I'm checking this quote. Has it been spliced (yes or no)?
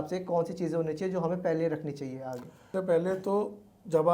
no